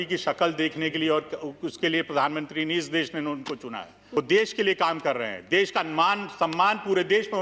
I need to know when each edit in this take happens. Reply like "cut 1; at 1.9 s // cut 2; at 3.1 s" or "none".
cut 1; at 4.0 s